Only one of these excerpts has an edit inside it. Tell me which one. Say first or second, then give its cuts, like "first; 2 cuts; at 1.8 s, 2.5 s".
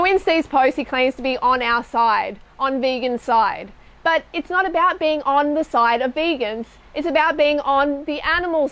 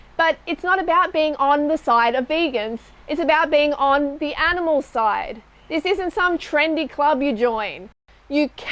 second; 1 cut; at 7.8 s